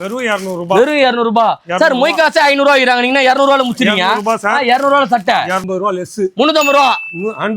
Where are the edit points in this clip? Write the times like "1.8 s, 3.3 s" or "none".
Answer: 5.6 s